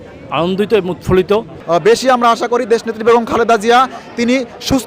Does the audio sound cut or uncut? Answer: cut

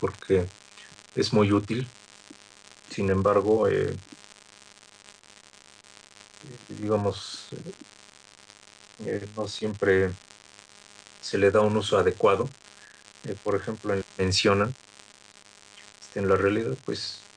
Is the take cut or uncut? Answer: uncut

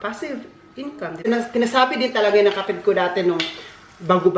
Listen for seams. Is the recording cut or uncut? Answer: cut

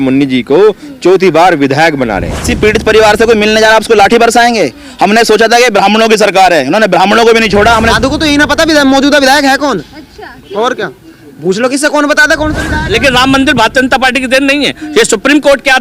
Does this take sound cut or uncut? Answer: cut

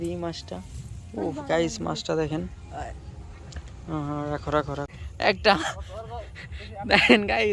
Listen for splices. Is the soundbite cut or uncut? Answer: cut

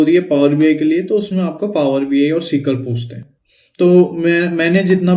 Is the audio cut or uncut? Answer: uncut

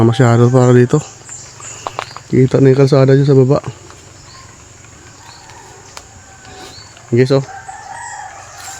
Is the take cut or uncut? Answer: uncut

